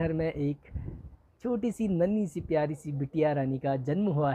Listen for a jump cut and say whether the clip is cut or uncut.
uncut